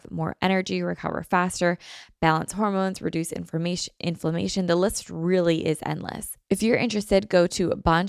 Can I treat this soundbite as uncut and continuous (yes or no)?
no